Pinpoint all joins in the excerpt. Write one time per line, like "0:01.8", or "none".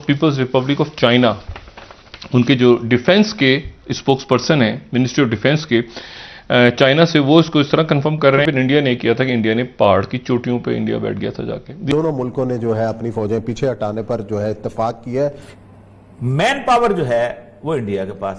0:08.4
0:11.9
0:15.4